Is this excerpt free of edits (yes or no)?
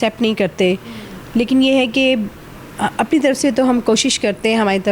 yes